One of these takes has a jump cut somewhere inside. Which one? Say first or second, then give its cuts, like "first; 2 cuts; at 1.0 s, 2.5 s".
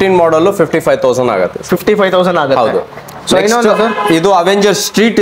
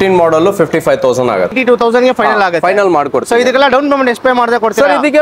second; 1 cut; at 1.6 s